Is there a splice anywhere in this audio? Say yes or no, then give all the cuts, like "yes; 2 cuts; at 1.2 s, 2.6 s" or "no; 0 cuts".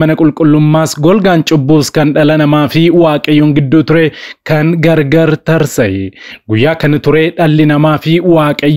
no; 0 cuts